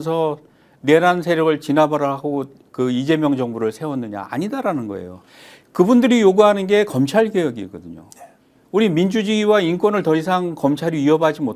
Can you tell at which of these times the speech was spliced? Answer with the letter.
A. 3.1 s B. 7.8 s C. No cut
C